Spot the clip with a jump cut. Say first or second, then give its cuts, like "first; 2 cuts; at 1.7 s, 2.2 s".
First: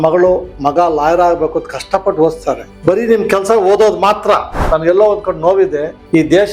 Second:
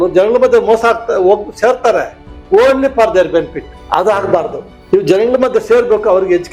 first; 2 cuts; at 2.7 s, 4.5 s